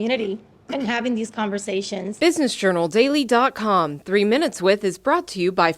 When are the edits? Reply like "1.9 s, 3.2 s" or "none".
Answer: 2.1 s